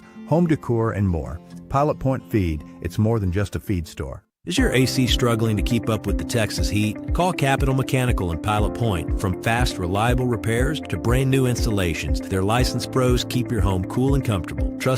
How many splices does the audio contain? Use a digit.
1